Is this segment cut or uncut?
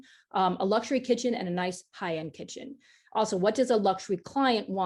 uncut